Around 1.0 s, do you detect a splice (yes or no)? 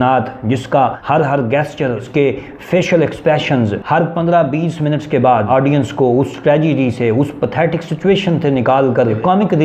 yes